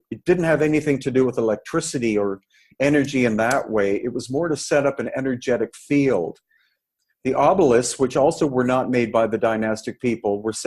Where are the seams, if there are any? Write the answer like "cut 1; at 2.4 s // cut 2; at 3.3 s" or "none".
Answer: cut 1; at 6.8 s

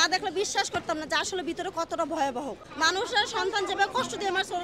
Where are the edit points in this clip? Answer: cut 1; at 2.6 s

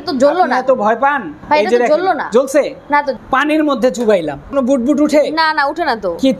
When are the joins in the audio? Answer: cut 1; at 1.3 s // cut 2; at 3.1 s // cut 3; at 4.5 s

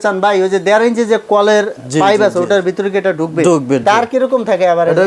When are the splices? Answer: cut 1; at 3.8 s

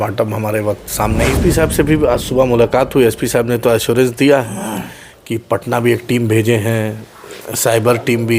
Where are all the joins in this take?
cut 1; at 1.3 s

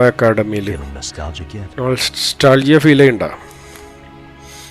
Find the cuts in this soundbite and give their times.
none

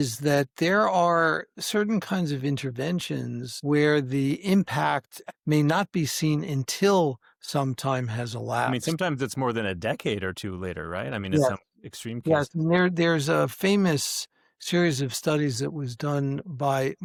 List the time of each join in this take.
none

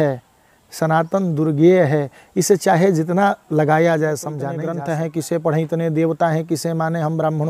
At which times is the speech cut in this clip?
cut 1; at 4.5 s

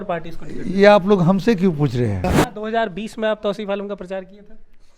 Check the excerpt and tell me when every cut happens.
cut 1; at 2.2 s

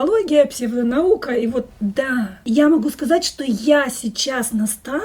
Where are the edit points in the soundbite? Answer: cut 1; at 2.4 s

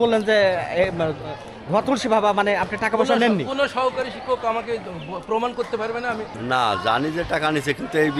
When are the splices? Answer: cut 1; at 6.4 s

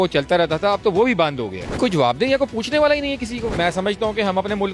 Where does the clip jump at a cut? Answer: cut 1; at 1.8 s // cut 2; at 3.6 s

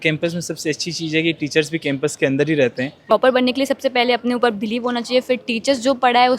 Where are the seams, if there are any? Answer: cut 1; at 3.0 s

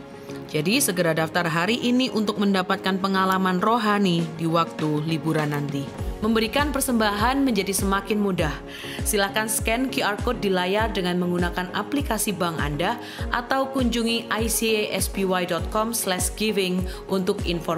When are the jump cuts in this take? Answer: cut 1; at 6.0 s

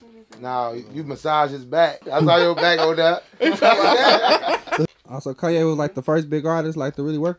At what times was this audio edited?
cut 1; at 2.0 s // cut 2; at 4.9 s

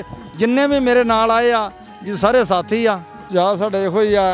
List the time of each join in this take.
cut 1; at 3.1 s

